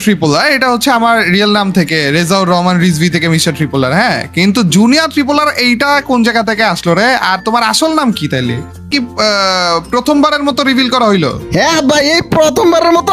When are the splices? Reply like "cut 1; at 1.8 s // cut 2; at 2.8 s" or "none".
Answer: cut 1; at 8.9 s